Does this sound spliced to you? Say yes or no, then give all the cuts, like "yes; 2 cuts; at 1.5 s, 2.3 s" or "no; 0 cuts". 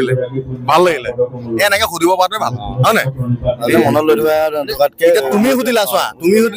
no; 0 cuts